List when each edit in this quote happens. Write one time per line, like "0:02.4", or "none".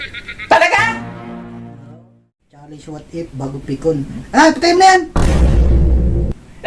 0:02.1